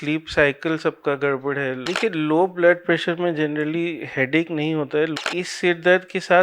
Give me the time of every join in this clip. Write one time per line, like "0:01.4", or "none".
0:01.8
0:05.1